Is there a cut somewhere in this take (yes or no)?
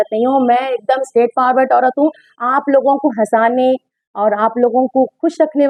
no